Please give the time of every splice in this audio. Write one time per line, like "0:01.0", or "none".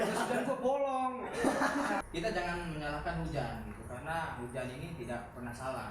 0:02.0